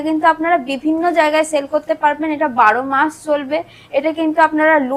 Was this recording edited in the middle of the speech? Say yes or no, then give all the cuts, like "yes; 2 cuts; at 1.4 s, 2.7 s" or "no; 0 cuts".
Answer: no; 0 cuts